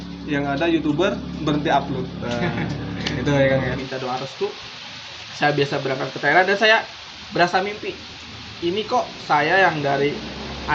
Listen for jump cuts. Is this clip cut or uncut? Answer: cut